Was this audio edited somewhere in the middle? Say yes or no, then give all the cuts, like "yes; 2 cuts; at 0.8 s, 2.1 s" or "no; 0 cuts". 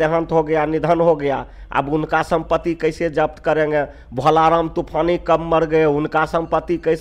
no; 0 cuts